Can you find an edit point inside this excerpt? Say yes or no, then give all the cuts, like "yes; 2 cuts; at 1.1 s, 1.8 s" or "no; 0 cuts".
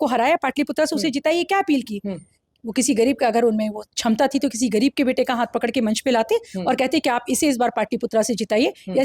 no; 0 cuts